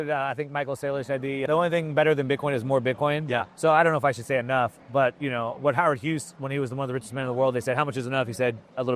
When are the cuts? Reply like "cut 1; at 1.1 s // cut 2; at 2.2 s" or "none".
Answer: none